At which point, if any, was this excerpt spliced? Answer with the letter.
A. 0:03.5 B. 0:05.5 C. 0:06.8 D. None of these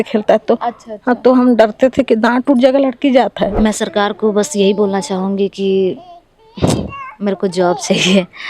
A